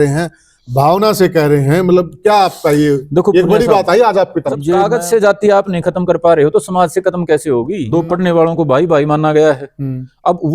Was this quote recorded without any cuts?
no; 2 cuts; at 4.8 s, 7.8 s

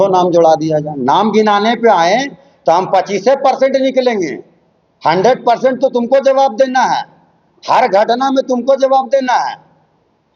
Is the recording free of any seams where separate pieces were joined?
yes; 0 cuts

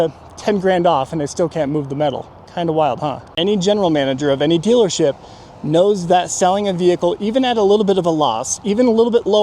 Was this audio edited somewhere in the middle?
yes; 1 cut; at 3.3 s

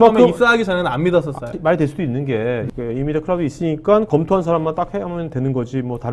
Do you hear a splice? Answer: yes; 3 cuts; at 1.6 s, 2.7 s, 4.1 s

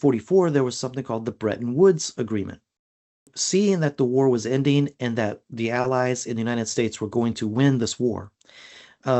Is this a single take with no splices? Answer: no; 1 cut; at 3.2 s

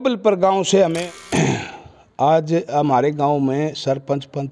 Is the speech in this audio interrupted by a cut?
yes; 1 cut; at 1.2 s

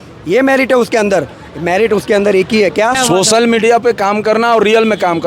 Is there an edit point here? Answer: yes; 1 cut; at 3.0 s

